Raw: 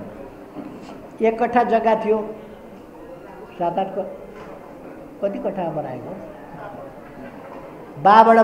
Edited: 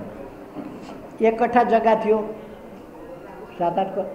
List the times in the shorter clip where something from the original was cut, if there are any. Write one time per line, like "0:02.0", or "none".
none